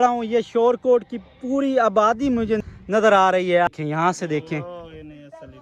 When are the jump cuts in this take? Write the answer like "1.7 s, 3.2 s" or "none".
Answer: 3.7 s